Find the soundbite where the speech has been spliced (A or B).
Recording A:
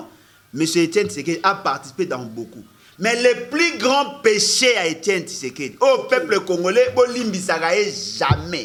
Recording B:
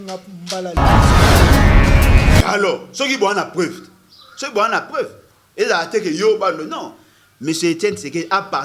B